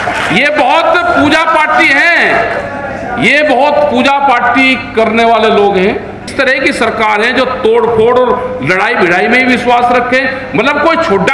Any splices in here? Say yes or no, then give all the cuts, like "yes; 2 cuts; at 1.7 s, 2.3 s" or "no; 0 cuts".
yes; 1 cut; at 6.3 s